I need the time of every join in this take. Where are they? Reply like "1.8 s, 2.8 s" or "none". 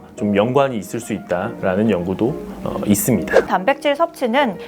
3.4 s